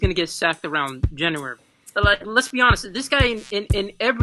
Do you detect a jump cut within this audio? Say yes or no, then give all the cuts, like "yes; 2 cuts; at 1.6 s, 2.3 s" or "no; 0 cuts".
yes; 1 cut; at 1.6 s